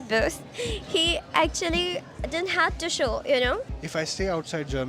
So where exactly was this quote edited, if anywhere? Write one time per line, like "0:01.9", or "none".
0:03.7